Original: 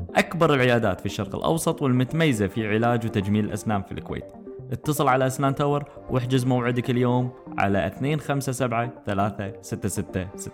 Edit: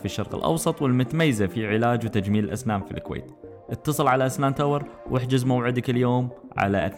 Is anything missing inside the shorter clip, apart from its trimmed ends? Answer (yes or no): no